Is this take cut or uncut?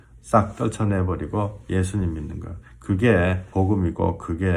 cut